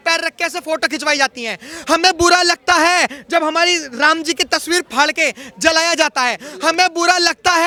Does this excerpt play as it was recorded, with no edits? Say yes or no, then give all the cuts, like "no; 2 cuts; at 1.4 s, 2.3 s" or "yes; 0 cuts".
yes; 0 cuts